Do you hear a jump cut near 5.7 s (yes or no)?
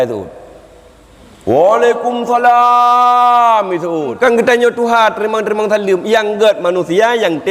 no